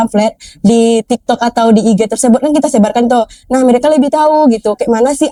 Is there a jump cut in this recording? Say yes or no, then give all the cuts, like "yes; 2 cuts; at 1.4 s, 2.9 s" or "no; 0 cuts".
no; 0 cuts